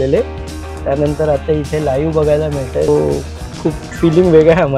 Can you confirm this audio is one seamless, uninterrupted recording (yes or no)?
no